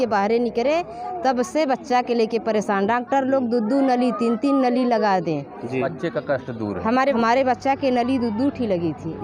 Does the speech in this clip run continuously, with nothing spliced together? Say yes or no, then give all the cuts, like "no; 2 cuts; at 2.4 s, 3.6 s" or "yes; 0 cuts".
no; 2 cuts; at 5.9 s, 7.2 s